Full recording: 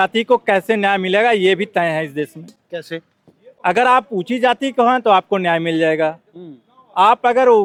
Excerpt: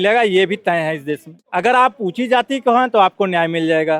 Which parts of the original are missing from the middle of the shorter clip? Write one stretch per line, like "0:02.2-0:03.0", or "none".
0:02.4-0:03.5